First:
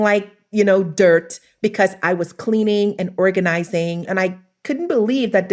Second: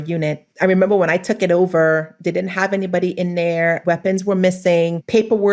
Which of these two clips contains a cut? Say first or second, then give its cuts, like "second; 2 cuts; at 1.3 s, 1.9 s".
first; 1 cut; at 4.1 s